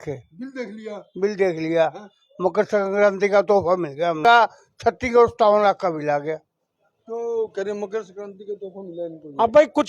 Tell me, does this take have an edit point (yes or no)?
yes